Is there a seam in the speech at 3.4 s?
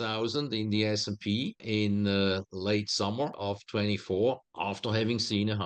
yes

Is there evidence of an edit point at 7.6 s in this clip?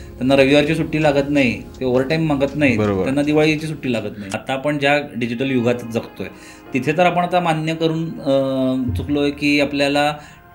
no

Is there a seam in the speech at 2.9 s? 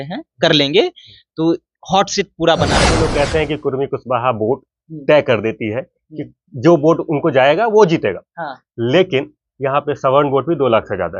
yes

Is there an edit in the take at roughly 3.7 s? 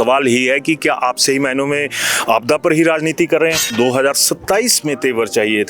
yes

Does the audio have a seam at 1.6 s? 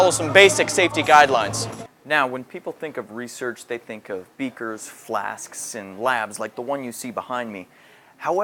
yes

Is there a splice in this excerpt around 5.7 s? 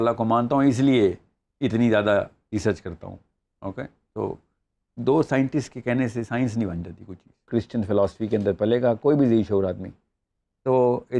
no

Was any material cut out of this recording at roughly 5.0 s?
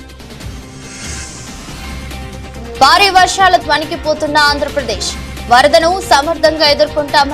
no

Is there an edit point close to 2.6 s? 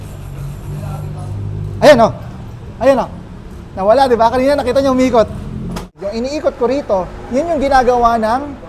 no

